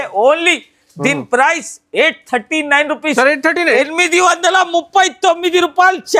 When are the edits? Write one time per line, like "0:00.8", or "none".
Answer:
none